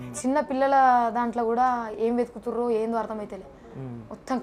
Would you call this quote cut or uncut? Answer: uncut